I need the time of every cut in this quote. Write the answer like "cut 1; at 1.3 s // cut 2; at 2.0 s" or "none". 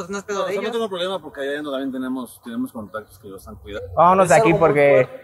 cut 1; at 3.8 s

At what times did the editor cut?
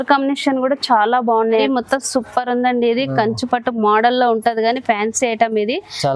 cut 1; at 1.7 s

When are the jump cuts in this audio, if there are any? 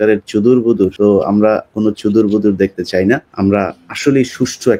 cut 1; at 0.9 s // cut 2; at 3.3 s

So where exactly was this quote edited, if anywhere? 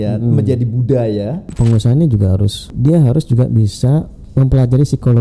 cut 1; at 1.5 s // cut 2; at 2.6 s // cut 3; at 4.2 s

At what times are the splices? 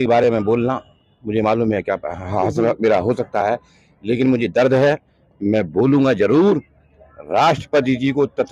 none

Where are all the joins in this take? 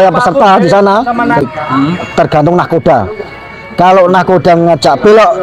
cut 1; at 1.5 s

